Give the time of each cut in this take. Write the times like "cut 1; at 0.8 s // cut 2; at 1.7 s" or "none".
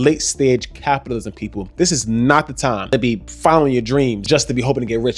cut 1; at 2.9 s // cut 2; at 4.2 s